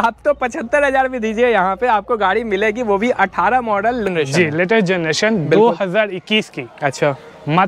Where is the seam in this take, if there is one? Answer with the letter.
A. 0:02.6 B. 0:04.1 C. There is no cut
B